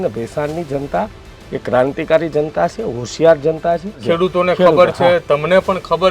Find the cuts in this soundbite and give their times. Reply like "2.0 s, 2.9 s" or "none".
4.1 s